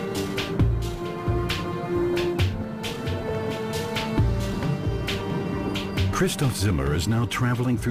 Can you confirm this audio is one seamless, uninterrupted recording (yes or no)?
yes